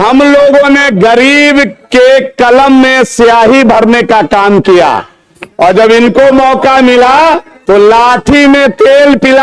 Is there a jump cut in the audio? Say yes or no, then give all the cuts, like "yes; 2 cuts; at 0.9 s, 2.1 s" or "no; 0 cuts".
no; 0 cuts